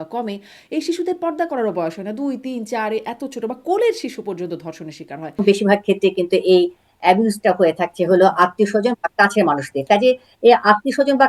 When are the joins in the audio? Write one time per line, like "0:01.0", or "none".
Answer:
0:05.4